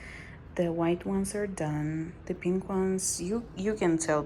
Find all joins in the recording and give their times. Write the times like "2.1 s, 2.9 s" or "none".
none